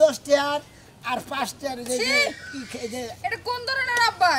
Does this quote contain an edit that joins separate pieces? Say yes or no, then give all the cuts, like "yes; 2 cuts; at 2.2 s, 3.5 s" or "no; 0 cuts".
no; 0 cuts